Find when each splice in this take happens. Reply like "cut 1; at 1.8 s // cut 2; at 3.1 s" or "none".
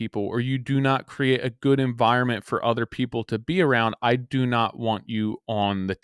none